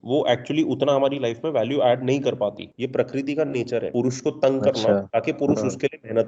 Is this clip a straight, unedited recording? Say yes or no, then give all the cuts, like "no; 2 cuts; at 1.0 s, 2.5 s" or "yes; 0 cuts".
no; 3 cuts; at 2.7 s, 3.9 s, 5.1 s